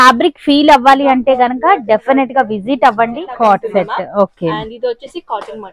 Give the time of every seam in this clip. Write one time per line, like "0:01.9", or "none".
0:03.2